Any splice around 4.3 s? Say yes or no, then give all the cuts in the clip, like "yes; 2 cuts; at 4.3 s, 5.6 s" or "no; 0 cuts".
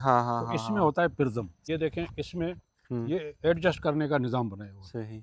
no; 1 cut; at 1.5 s